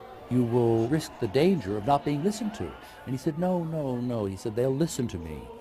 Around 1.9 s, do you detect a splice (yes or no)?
yes